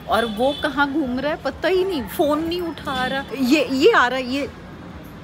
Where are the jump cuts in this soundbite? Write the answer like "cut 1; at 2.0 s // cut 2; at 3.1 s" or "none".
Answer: cut 1; at 3.3 s